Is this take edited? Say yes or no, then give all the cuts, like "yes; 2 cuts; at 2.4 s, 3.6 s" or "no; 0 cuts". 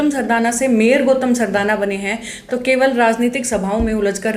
no; 0 cuts